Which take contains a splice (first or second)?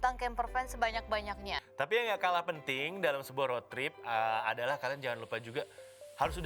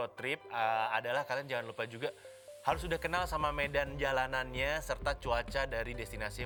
first